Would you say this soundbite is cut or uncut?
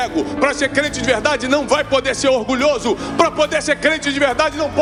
uncut